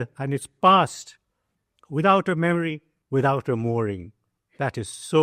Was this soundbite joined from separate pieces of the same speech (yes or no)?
yes